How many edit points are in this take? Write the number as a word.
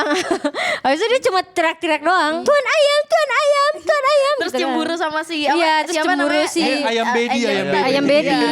one